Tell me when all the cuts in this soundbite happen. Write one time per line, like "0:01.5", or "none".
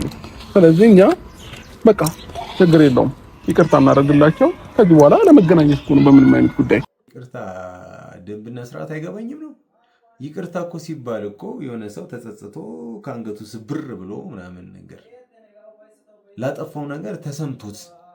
0:07.2